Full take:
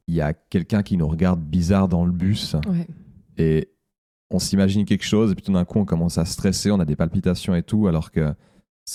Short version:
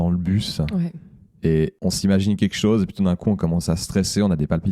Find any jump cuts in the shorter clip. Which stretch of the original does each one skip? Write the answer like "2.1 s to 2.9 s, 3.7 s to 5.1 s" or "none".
3.7 s to 4.2 s